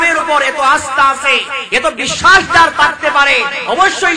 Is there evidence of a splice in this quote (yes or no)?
no